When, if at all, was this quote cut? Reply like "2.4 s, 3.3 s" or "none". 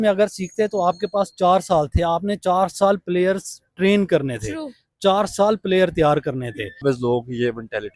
6.8 s